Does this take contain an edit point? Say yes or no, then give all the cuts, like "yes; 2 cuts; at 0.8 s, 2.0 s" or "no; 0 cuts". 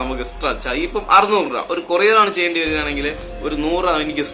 no; 0 cuts